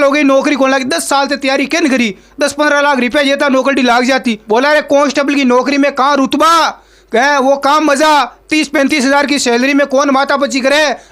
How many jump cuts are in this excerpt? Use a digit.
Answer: 1